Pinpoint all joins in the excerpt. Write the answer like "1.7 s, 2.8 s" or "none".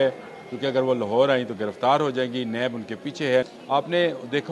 3.5 s